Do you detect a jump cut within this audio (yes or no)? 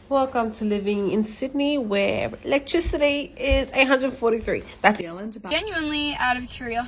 yes